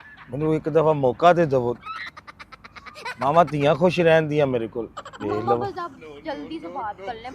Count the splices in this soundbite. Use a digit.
1